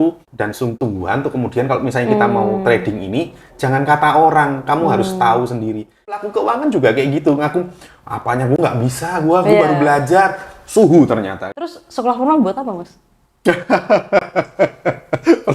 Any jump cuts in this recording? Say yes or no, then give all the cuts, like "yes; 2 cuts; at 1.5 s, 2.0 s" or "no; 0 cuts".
yes; 3 cuts; at 0.8 s, 6.3 s, 11.7 s